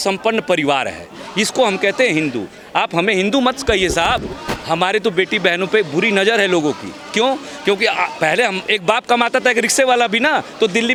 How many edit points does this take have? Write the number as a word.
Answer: zero